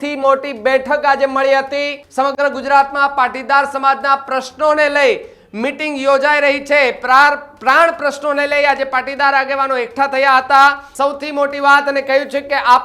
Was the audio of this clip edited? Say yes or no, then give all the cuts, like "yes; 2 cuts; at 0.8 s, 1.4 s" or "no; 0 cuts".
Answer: yes; 2 cuts; at 2.0 s, 10.9 s